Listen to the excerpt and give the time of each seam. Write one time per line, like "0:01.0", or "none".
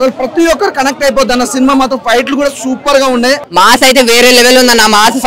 0:03.4